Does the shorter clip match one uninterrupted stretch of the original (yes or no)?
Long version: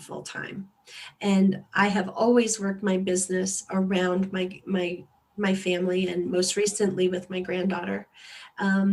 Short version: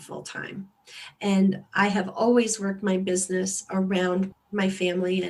no